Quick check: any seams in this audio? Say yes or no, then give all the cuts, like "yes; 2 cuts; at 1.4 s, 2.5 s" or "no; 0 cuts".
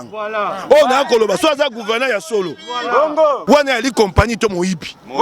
yes; 1 cut; at 3.4 s